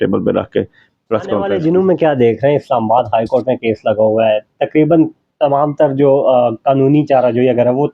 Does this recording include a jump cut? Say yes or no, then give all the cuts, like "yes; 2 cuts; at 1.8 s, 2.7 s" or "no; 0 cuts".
yes; 1 cut; at 1.4 s